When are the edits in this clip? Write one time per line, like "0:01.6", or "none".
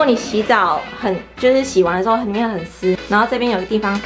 0:03.0